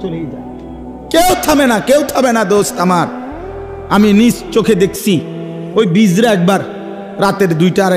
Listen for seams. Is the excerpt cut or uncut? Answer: uncut